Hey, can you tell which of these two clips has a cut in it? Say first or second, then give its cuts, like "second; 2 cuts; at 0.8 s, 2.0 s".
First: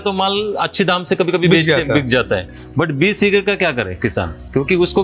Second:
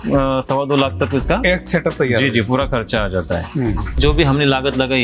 second; 2 cuts; at 1.4 s, 4.0 s